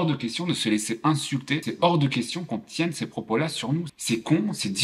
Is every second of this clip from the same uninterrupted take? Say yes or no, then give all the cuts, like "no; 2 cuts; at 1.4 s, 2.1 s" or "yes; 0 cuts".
no; 1 cut; at 1.7 s